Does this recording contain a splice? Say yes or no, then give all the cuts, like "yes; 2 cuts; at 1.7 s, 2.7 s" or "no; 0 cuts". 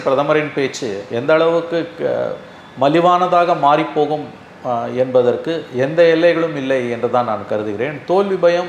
no; 0 cuts